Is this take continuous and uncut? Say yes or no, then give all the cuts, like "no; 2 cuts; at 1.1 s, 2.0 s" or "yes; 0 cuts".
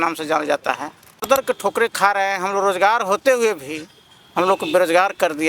no; 1 cut; at 1.2 s